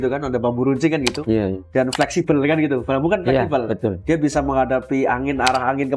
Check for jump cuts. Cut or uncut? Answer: uncut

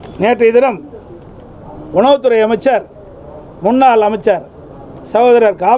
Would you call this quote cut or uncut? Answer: uncut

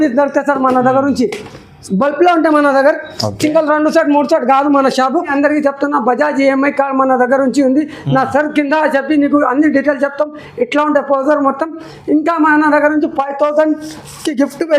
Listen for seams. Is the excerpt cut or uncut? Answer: cut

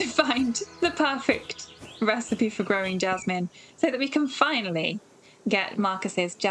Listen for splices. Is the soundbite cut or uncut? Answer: uncut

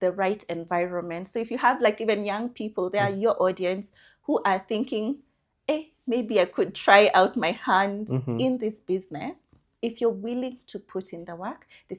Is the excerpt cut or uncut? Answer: uncut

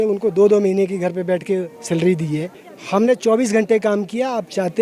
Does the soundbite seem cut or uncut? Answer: cut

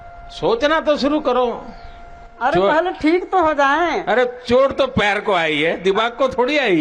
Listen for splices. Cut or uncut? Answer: uncut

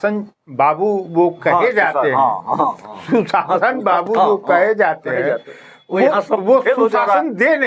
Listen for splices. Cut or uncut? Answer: uncut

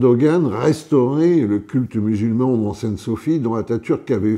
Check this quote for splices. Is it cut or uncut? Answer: uncut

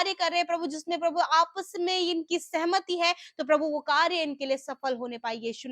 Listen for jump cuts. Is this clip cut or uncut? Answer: uncut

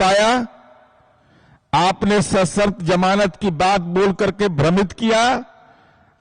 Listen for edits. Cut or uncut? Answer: uncut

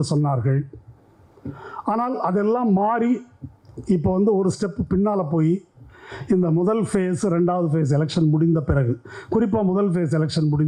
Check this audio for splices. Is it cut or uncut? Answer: uncut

